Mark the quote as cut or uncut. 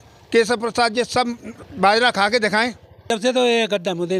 cut